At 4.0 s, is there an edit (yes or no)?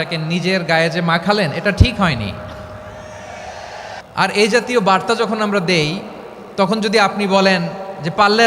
yes